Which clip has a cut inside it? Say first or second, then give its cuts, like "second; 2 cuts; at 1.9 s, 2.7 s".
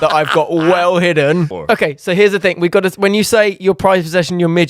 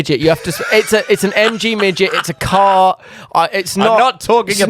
first; 1 cut; at 1.5 s